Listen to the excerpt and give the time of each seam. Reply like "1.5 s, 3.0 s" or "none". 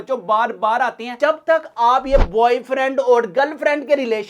1.1 s